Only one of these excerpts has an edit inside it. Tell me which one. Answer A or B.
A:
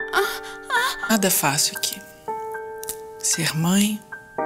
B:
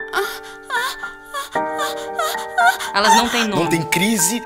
B